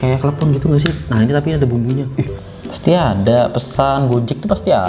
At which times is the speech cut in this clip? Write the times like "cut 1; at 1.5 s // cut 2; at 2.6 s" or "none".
cut 1; at 2.4 s